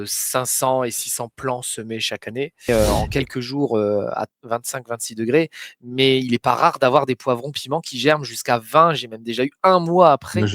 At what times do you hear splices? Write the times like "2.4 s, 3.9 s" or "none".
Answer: 2.7 s